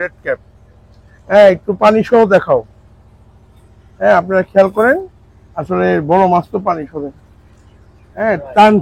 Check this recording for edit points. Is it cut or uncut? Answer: uncut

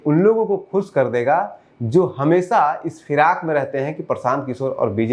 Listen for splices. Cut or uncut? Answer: uncut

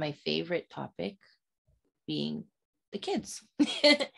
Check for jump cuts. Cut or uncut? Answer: uncut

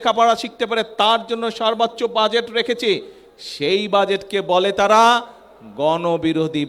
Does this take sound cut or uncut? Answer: uncut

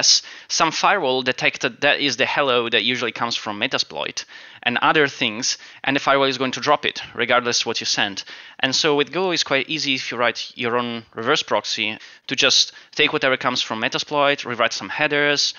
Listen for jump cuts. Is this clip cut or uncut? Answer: uncut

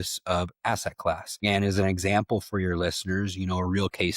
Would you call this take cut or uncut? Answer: cut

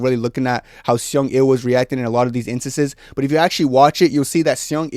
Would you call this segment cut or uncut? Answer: uncut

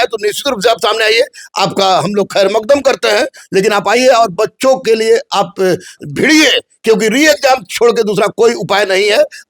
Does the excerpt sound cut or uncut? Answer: uncut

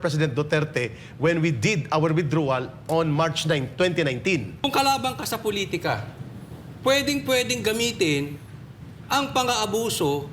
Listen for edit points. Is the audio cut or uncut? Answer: cut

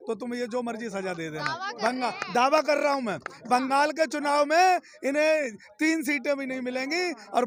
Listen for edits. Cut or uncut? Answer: uncut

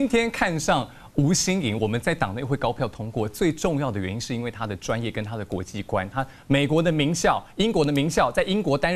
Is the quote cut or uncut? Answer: uncut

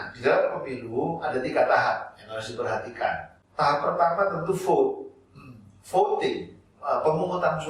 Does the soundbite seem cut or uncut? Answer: cut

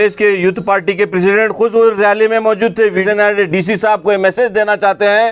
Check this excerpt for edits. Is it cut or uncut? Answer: cut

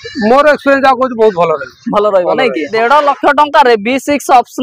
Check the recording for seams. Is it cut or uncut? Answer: cut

